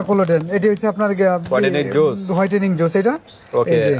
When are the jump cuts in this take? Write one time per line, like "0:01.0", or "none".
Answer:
none